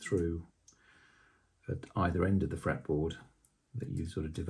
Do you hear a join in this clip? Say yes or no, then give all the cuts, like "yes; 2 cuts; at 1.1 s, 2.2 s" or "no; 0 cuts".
no; 0 cuts